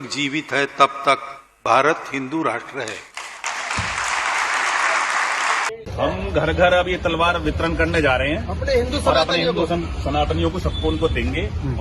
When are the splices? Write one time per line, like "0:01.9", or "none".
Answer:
0:05.7